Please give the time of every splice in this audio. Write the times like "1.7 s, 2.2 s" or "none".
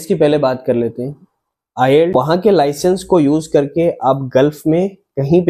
2.1 s